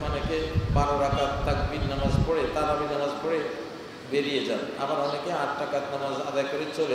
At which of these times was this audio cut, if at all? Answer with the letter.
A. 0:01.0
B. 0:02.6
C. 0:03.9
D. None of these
D